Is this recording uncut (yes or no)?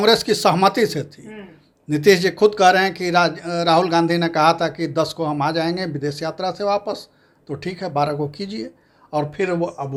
yes